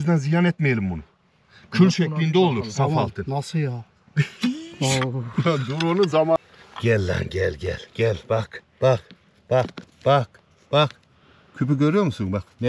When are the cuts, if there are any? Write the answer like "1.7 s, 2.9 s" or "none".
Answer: 6.4 s